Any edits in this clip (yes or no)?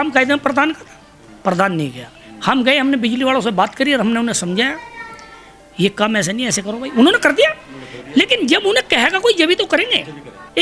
no